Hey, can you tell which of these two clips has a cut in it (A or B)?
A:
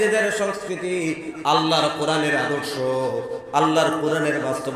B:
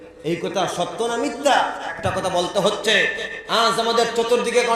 B